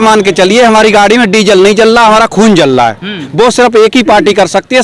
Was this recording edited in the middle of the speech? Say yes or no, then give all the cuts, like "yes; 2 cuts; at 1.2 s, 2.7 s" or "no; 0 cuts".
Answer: yes; 1 cut; at 3.2 s